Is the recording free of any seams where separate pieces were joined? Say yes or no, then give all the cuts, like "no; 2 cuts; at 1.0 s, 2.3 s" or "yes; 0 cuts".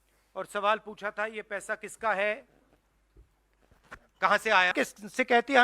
no; 1 cut; at 4.7 s